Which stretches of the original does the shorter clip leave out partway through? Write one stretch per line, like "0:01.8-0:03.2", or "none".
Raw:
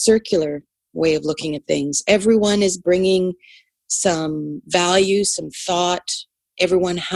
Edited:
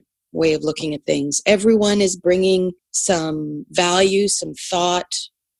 0:03.5-0:03.8